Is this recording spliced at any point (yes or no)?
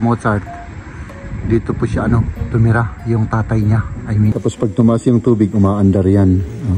yes